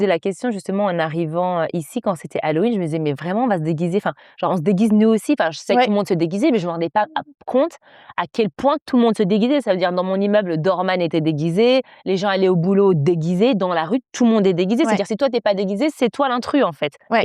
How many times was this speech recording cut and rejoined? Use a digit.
0